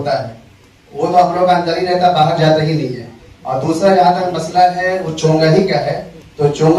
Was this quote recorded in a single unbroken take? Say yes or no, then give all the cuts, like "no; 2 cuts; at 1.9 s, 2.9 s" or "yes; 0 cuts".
yes; 0 cuts